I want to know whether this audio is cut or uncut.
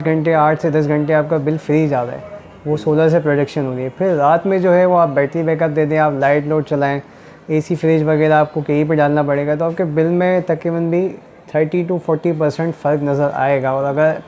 uncut